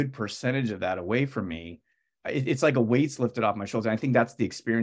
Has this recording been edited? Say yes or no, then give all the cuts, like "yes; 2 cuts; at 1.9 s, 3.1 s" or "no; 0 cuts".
no; 0 cuts